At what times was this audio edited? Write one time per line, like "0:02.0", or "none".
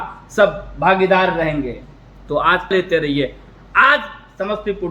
0:02.7